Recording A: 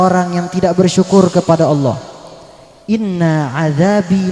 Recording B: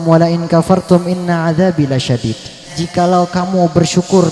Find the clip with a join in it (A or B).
B